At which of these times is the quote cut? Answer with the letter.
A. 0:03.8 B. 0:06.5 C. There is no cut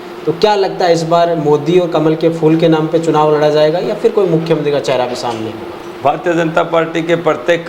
C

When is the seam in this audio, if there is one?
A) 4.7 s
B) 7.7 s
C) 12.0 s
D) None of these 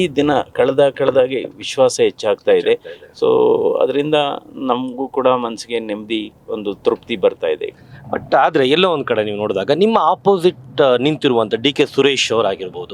D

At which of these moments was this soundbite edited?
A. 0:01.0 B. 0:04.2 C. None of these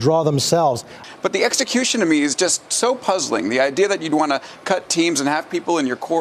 A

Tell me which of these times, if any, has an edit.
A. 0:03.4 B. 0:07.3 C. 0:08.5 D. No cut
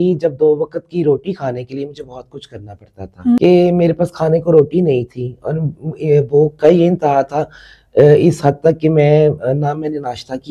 A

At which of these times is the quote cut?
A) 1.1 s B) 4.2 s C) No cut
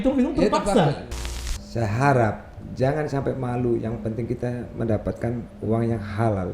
A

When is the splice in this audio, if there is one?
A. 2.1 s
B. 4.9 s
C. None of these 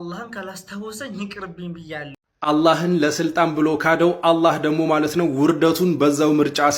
A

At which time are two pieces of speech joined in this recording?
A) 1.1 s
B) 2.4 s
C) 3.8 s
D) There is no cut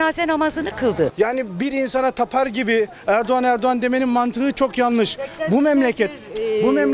A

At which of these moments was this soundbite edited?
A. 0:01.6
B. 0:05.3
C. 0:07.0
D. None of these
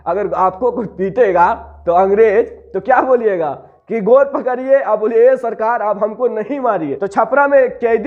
C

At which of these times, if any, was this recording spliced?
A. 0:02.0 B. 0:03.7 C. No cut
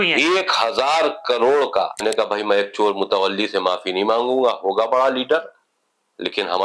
A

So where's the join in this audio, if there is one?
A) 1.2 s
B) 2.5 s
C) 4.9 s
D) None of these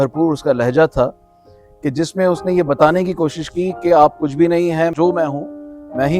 C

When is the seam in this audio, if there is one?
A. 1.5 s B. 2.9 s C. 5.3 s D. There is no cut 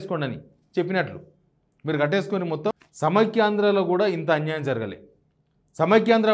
B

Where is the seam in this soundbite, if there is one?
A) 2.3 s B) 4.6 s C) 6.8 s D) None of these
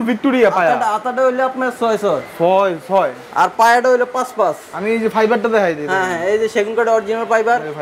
D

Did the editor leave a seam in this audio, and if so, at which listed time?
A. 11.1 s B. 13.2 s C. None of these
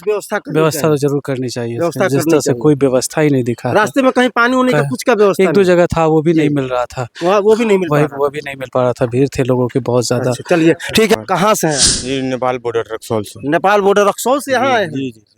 A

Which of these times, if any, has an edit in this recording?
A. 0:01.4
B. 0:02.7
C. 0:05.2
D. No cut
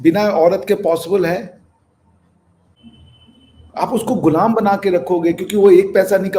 B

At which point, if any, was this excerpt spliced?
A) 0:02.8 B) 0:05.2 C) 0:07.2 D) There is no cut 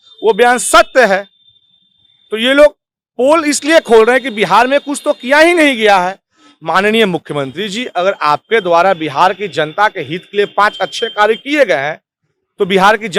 D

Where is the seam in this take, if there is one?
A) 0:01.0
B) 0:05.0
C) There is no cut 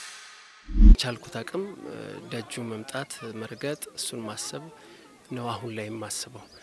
A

